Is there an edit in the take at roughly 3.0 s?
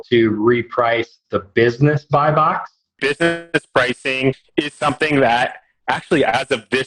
yes; 1 cut; at 3.0 s

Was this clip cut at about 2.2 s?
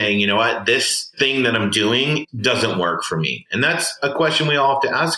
yes; 2 cuts; at 1.1 s, 2.2 s

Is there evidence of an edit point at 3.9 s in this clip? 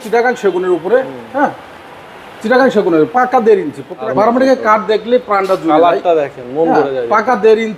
yes; 1 cut; at 3.9 s

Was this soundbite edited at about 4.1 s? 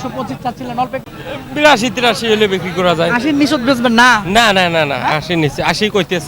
no; 1 cut; at 1.1 s

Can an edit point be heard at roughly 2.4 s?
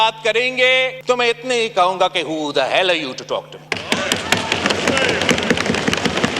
no; 2 cuts; at 1.0 s, 3.6 s

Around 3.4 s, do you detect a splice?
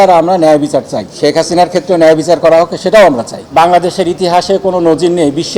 yes; 2 cuts; at 1.0 s, 3.4 s

